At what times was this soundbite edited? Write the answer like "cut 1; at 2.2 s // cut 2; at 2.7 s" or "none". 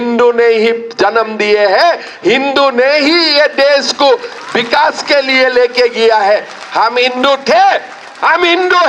none